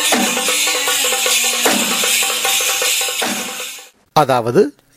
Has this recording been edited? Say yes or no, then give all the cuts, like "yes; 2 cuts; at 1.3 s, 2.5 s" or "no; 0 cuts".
yes; 1 cut; at 3.9 s